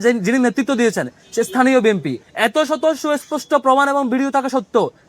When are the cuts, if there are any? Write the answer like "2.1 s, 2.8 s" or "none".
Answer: 2.2 s